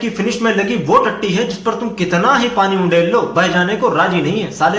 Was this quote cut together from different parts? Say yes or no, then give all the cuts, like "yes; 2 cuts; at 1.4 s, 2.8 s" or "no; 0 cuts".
no; 0 cuts